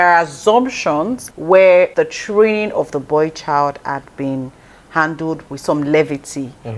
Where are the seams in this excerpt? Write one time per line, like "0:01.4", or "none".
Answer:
0:01.2
0:01.9
0:05.5